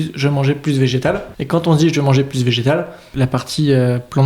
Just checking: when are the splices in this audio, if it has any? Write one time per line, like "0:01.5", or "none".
0:01.3
0:03.1